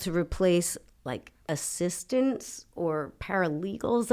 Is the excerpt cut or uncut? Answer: cut